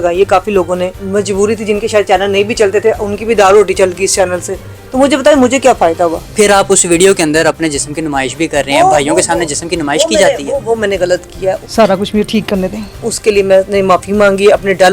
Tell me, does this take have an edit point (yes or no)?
yes